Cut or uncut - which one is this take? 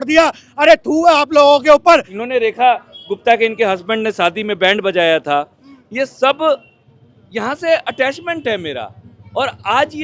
cut